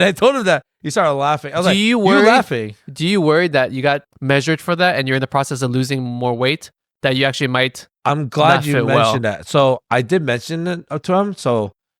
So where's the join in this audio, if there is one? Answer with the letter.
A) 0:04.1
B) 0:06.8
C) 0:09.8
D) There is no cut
A